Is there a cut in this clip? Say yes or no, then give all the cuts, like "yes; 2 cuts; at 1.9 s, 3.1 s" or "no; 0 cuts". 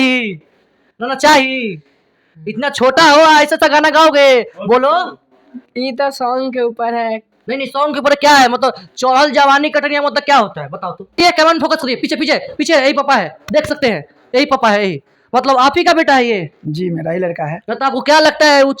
yes; 1 cut; at 11.2 s